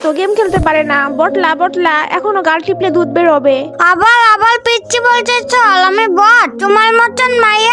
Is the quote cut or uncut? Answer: cut